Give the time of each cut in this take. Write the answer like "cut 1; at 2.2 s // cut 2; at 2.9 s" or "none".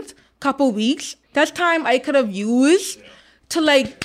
cut 1; at 1.1 s